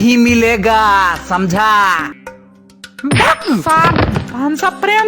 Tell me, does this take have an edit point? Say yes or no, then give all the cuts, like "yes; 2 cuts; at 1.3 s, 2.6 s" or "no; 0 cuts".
yes; 1 cut; at 2.1 s